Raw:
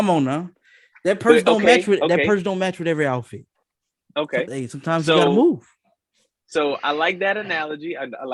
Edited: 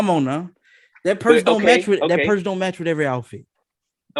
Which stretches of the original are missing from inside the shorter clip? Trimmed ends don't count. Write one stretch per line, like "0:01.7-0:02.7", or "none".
none